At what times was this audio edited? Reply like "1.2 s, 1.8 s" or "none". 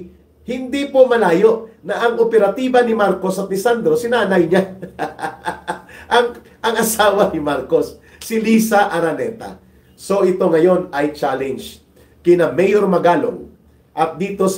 none